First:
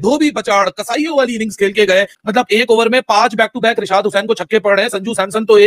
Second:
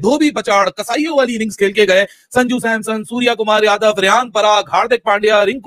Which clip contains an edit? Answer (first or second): first